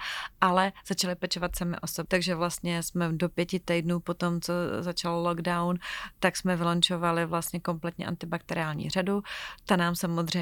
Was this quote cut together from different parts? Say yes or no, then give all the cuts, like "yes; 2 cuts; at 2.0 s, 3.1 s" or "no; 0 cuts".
yes; 1 cut; at 1.9 s